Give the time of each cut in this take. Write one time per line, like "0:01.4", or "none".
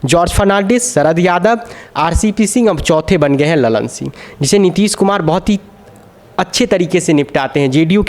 none